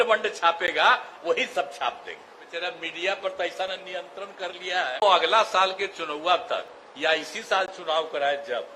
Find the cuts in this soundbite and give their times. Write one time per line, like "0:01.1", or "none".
0:02.5
0:05.0